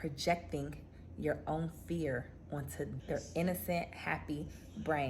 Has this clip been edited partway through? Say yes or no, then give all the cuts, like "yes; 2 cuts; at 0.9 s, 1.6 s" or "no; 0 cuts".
yes; 1 cut; at 2.9 s